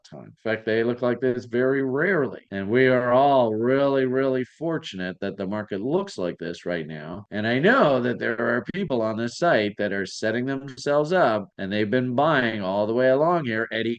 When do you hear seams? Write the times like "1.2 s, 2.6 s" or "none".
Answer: none